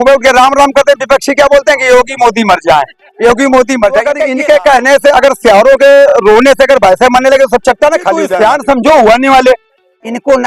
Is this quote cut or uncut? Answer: cut